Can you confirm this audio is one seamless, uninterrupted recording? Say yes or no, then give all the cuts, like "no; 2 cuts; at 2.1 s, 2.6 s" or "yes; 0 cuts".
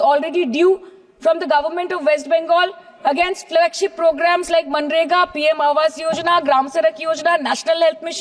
yes; 0 cuts